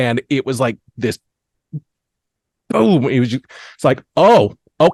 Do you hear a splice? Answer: no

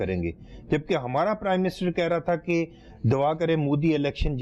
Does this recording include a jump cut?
no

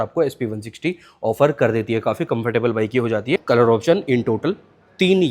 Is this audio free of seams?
no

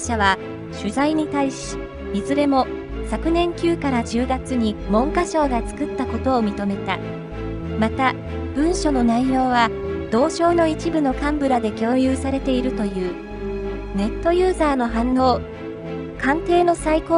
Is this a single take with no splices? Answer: yes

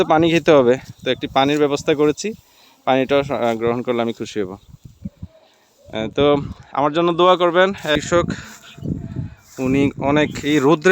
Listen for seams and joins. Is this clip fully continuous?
no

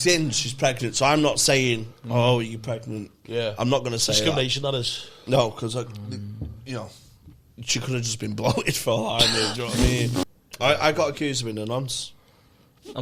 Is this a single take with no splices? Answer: no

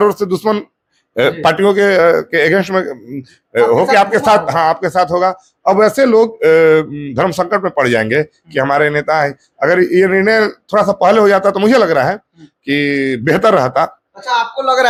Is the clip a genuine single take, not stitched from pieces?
yes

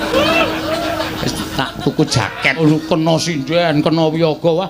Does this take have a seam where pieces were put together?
yes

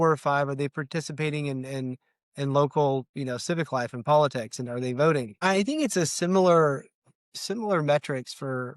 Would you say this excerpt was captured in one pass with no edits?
no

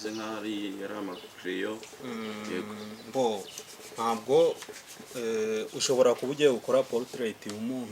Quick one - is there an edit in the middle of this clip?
no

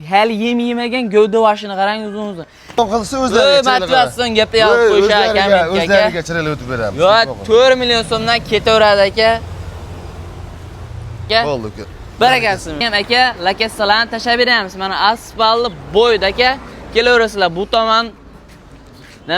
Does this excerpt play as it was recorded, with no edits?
no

